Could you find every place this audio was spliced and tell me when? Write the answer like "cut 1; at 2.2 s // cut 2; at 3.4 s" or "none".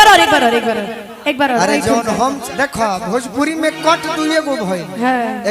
cut 1; at 2.4 s